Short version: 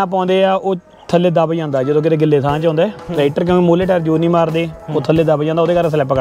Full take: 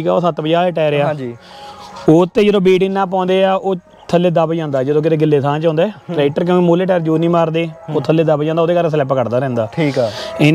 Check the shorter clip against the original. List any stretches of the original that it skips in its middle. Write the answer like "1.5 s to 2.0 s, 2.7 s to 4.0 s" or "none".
none